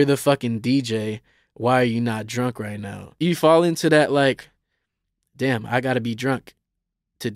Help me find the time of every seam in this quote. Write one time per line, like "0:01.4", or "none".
0:03.1